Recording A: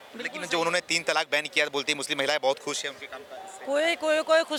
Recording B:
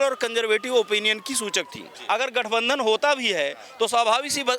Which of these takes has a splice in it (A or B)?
B